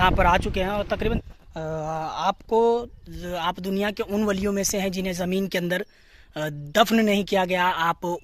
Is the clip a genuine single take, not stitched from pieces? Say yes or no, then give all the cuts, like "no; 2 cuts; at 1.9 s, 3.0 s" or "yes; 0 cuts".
no; 1 cut; at 1.2 s